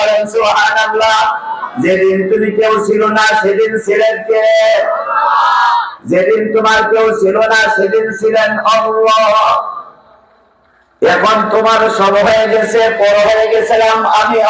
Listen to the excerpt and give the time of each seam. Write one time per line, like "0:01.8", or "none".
none

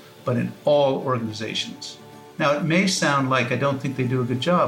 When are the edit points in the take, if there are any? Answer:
none

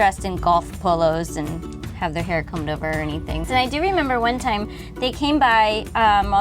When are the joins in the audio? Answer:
0:01.8
0:03.4

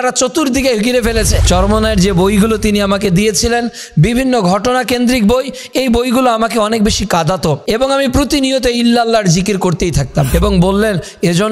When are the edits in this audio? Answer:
0:01.4
0:07.6
0:10.3

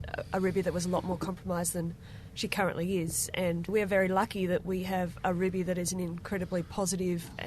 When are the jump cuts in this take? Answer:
0:03.7

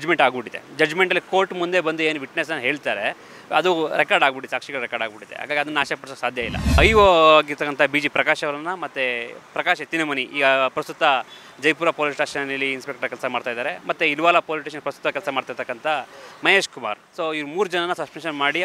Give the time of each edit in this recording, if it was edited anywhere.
0:06.8
0:17.0

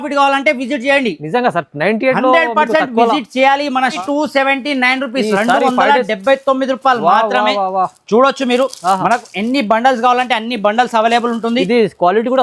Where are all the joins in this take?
0:04.0

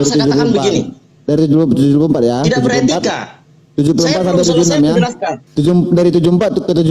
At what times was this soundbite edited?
0:05.4

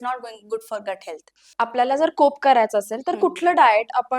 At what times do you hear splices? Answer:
0:01.5

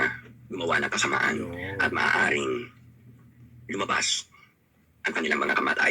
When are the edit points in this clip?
none

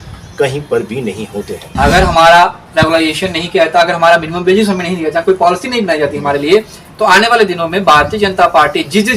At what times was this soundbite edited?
0:01.6

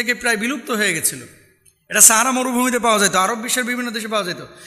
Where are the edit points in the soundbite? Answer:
none

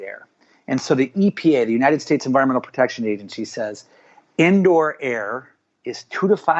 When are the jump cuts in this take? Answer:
none

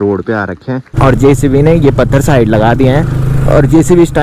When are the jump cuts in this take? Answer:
0:00.9

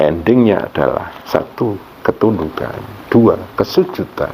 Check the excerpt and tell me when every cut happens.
none

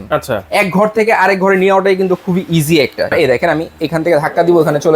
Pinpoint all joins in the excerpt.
0:03.1

